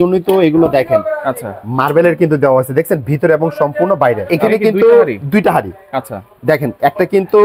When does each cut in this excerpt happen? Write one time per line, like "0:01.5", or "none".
0:04.2